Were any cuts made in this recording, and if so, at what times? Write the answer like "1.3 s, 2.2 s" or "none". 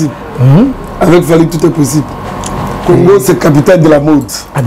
2.7 s

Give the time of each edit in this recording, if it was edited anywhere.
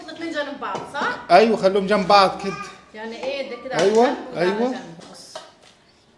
5.0 s

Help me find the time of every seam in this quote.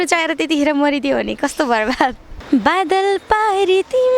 2.3 s

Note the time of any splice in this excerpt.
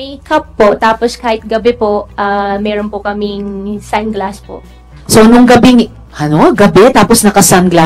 none

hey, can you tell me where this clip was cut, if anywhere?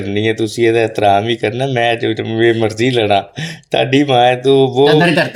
none

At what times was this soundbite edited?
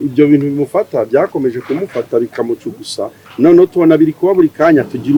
none

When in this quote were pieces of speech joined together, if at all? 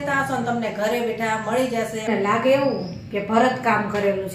2.1 s

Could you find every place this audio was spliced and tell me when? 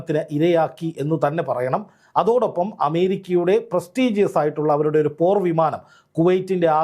none

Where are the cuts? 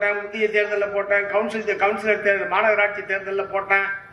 none

